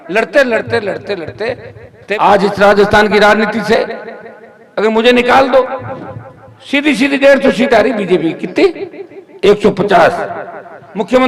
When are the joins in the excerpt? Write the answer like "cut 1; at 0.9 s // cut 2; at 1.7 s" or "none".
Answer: cut 1; at 2.1 s